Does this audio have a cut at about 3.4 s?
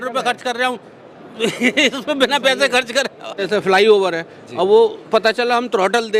yes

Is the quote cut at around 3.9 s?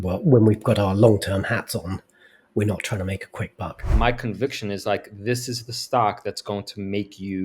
yes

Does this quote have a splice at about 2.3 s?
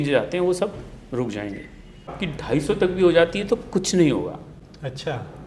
yes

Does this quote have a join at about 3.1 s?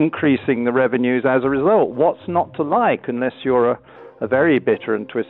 no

